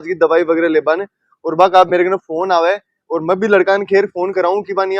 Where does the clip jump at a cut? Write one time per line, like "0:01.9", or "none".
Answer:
none